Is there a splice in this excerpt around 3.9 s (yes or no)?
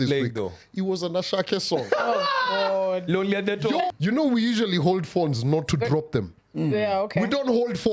yes